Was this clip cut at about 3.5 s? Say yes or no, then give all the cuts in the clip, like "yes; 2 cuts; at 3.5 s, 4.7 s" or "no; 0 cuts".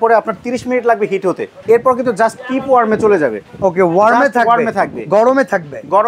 no; 1 cut; at 1.5 s